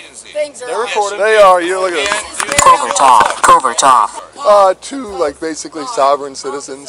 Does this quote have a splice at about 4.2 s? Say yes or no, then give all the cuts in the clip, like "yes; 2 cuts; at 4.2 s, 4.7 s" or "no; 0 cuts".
yes; 1 cut; at 4.2 s